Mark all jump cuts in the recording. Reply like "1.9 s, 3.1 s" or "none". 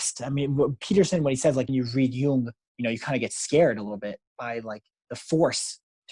1.7 s, 4.3 s